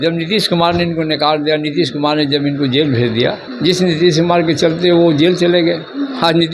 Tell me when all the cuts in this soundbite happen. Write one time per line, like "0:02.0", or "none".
0:03.4